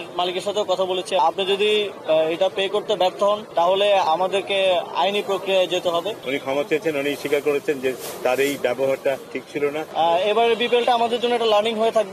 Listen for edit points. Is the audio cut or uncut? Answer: cut